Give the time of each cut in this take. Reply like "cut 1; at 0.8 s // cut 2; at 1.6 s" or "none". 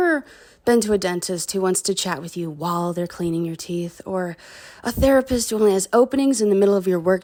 none